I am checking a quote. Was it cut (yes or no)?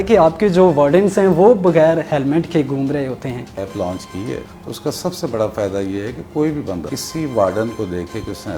yes